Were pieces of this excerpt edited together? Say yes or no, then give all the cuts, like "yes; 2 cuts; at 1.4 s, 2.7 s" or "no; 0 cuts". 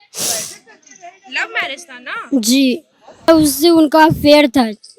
yes; 1 cut; at 3.3 s